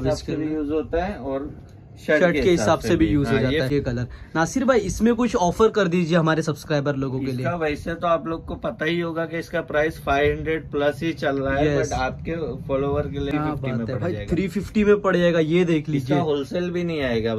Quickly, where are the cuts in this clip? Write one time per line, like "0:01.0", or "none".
0:03.7
0:13.3